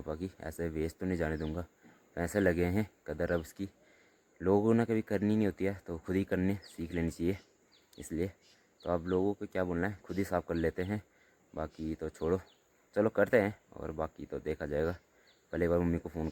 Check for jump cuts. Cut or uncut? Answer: uncut